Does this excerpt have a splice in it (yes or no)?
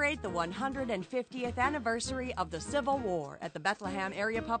no